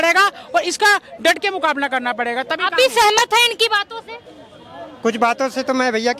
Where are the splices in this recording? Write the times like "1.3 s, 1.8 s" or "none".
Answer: none